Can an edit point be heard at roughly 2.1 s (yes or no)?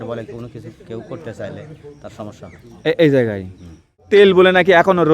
no